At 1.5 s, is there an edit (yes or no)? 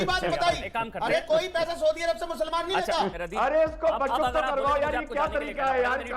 no